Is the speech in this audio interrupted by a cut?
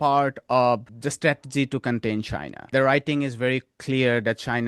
yes; 2 cuts; at 0.9 s, 2.7 s

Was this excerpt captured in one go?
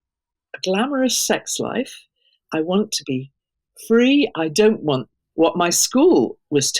yes; 0 cuts

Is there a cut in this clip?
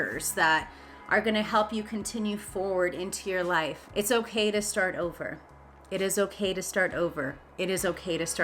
no; 0 cuts

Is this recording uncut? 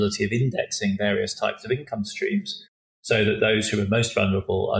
yes; 0 cuts

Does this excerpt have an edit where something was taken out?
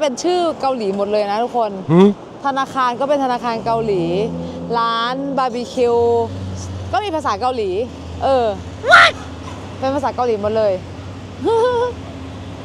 no; 0 cuts

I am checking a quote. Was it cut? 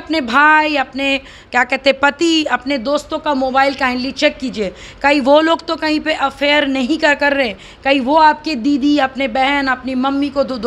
no; 0 cuts

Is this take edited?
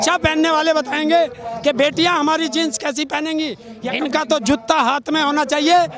yes; 1 cut; at 3.6 s

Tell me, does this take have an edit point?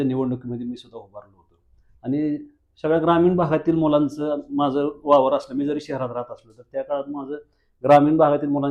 no; 0 cuts

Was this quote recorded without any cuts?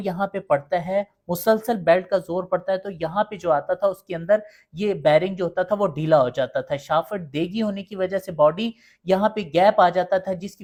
yes; 0 cuts

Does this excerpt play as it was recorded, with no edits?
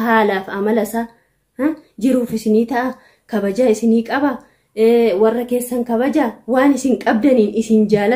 yes; 0 cuts

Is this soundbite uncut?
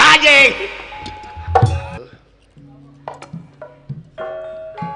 no; 1 cut; at 2.0 s

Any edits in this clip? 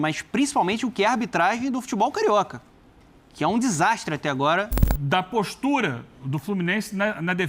yes; 1 cut; at 4.8 s

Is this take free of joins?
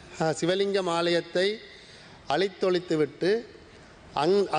yes; 0 cuts

